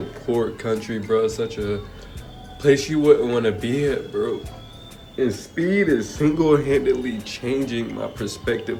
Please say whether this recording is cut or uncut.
uncut